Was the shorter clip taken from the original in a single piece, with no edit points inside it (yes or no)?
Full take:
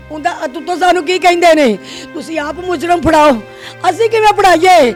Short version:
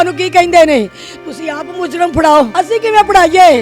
no